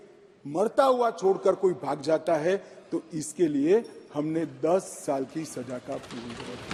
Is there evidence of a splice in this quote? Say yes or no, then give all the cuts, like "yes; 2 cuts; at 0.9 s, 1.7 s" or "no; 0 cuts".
no; 0 cuts